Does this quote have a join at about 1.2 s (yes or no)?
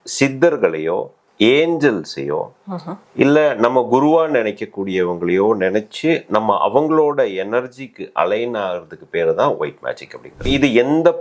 yes